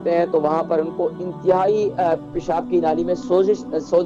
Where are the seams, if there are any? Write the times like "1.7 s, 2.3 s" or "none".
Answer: none